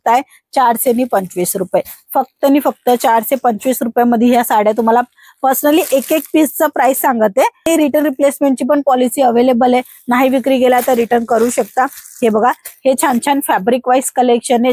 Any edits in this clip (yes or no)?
yes